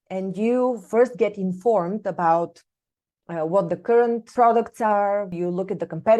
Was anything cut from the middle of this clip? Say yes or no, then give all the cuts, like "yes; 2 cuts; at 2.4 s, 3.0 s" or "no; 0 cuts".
yes; 2 cuts; at 4.3 s, 5.3 s